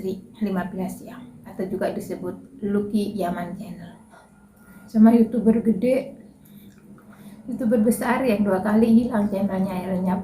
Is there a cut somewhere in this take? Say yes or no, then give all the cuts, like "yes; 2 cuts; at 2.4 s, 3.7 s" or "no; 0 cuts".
yes; 2 cuts; at 1.4 s, 4.8 s